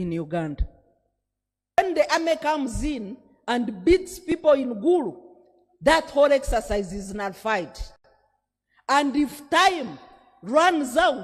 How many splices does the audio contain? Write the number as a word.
one